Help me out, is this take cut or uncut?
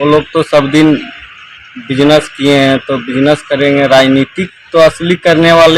uncut